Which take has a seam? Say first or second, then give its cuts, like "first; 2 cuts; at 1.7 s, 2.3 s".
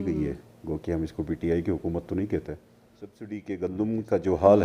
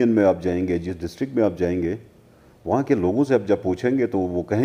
first; 1 cut; at 3.3 s